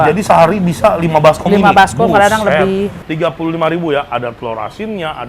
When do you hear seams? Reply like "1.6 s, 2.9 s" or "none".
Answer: 3.1 s